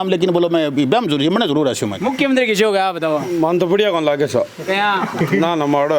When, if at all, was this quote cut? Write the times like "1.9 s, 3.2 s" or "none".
1.9 s